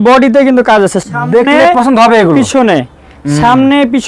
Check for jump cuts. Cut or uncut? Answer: uncut